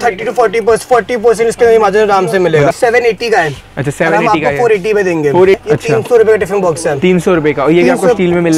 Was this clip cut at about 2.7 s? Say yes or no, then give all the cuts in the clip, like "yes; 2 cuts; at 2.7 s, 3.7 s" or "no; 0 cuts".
yes; 2 cuts; at 2.7 s, 5.6 s